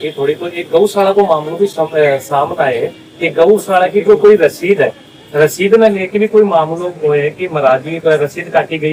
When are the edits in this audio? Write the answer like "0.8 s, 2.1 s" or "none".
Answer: none